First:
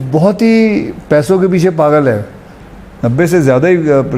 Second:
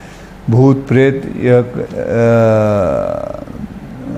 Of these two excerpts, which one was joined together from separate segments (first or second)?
first